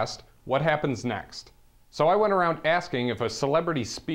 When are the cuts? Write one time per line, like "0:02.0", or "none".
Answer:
none